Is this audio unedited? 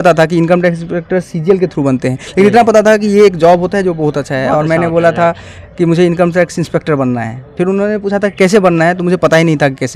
yes; 0 cuts

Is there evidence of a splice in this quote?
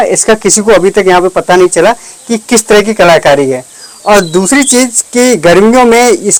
no; 0 cuts

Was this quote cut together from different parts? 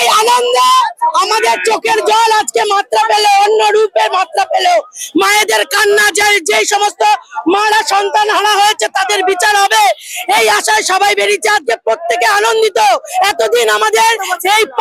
no; 0 cuts

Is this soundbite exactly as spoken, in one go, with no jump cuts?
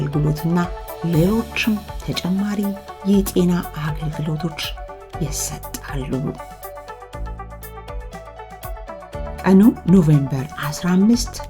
no; 2 cuts; at 6.4 s, 8.8 s

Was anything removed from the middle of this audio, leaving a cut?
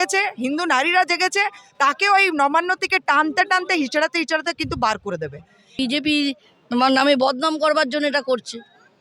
yes; 1 cut; at 5.8 s

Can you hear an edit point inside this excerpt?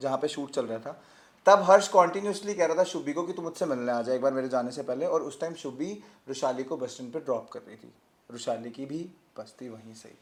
no; 0 cuts

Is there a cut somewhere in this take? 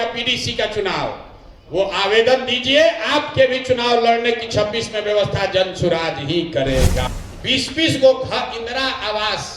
yes; 1 cut; at 7.1 s

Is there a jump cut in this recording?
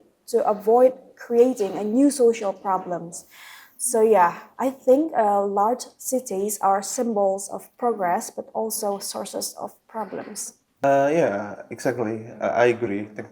yes; 1 cut; at 10.8 s

